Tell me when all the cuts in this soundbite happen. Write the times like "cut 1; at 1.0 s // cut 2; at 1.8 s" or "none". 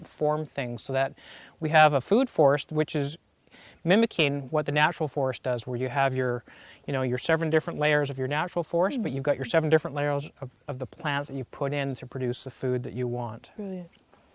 none